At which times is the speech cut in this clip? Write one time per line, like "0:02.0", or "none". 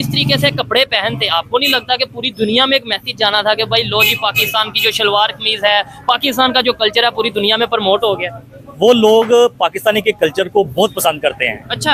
none